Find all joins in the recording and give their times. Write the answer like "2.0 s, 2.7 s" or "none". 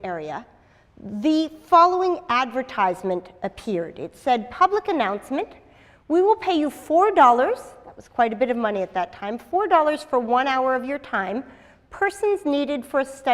6.7 s